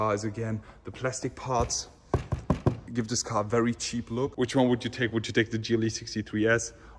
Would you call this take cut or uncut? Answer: cut